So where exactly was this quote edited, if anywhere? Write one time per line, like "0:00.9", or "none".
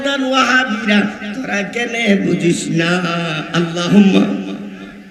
none